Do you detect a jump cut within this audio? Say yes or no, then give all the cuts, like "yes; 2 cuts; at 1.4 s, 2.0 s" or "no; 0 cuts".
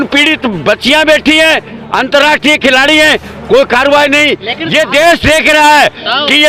no; 0 cuts